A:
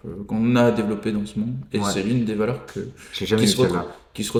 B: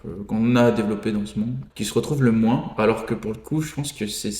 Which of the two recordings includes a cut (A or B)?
B